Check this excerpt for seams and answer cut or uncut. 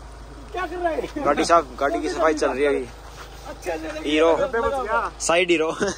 uncut